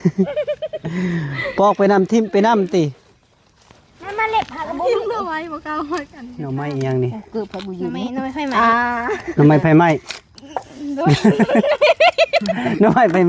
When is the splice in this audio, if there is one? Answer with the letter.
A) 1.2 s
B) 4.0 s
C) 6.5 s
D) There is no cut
C